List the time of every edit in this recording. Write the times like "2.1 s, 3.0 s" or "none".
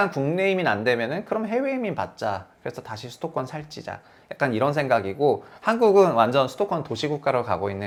none